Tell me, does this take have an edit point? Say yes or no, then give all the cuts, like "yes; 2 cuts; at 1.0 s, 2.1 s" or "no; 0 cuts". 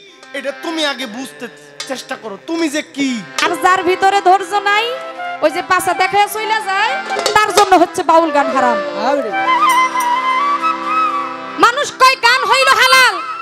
yes; 1 cut; at 3.3 s